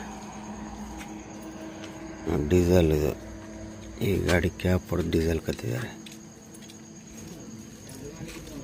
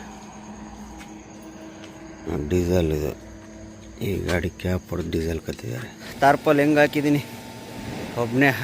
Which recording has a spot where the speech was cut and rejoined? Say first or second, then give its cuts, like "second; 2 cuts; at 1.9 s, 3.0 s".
second; 1 cut; at 6.0 s